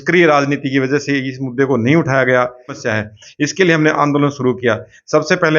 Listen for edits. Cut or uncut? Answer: cut